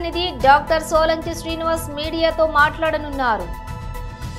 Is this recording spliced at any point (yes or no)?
yes